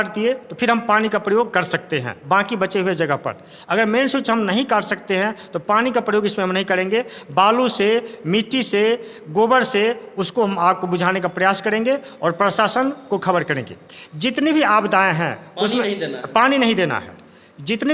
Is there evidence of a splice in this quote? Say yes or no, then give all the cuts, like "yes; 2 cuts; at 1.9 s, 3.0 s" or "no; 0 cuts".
no; 0 cuts